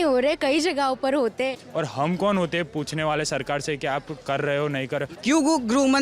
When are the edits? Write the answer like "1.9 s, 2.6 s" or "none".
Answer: 1.6 s, 5.1 s